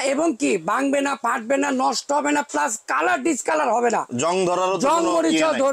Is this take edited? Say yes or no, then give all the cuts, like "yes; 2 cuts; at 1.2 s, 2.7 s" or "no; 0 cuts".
no; 0 cuts